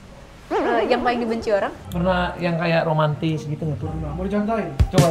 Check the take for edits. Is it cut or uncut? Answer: cut